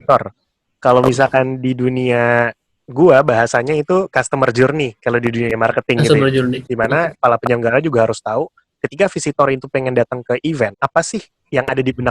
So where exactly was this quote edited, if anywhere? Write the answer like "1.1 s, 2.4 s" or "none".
6.6 s, 10.7 s